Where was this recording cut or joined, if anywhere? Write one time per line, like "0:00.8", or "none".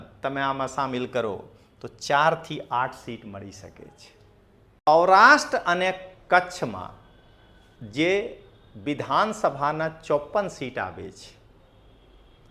0:04.9